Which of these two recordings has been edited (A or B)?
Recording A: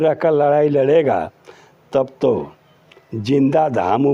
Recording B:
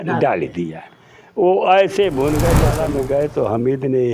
B